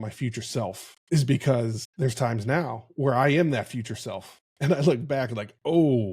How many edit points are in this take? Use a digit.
1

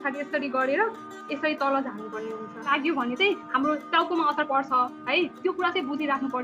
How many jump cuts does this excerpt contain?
1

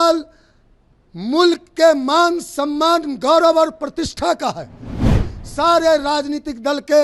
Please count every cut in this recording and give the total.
1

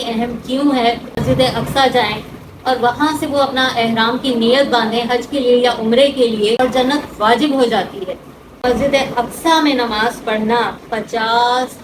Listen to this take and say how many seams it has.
3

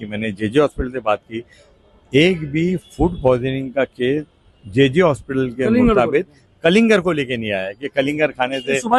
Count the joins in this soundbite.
0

